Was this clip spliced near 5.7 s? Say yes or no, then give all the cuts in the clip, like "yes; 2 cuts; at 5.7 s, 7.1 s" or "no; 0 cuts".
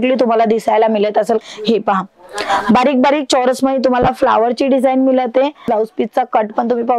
yes; 2 cuts; at 1.4 s, 5.7 s